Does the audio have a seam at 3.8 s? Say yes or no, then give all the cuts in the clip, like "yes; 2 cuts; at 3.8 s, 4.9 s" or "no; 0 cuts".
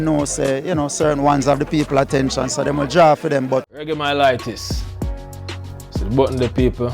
yes; 1 cut; at 3.8 s